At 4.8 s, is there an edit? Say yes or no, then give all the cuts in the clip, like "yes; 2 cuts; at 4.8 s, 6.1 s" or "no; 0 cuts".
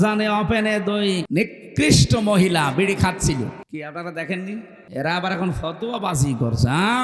yes; 3 cuts; at 1.3 s, 3.6 s, 4.8 s